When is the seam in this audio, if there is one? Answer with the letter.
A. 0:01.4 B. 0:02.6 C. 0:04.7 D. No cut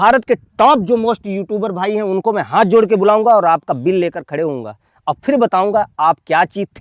D